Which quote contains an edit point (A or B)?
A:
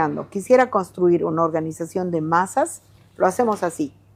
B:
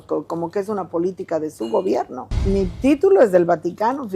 B